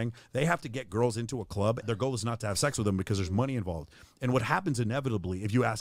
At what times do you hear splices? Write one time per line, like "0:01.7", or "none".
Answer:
0:01.8